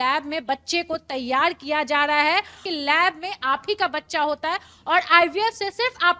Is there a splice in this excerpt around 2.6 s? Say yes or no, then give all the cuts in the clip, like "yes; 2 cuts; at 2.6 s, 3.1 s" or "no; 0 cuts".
yes; 1 cut; at 2.6 s